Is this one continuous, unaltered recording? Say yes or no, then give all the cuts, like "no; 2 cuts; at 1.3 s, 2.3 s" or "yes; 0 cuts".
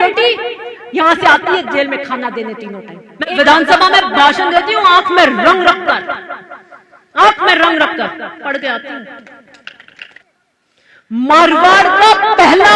no; 2 cuts; at 3.4 s, 10.2 s